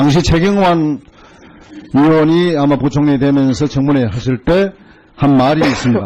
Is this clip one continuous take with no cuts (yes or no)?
yes